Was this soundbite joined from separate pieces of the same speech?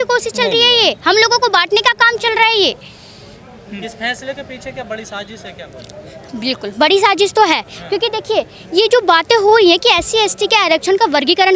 no; 0 cuts

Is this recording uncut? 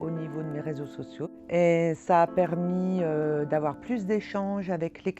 no; 1 cut; at 1.4 s

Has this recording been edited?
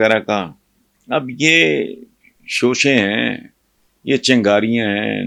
no; 0 cuts

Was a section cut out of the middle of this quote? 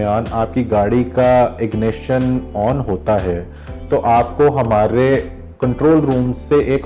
no; 0 cuts

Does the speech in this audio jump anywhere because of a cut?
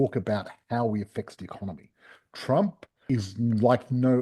yes; 1 cut; at 3.0 s

